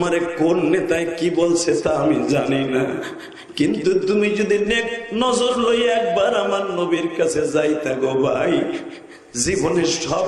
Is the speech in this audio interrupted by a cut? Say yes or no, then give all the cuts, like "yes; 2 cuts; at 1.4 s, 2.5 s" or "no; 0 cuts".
no; 0 cuts